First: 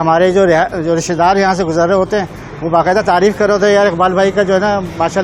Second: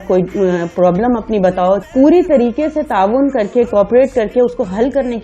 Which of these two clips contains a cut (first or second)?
second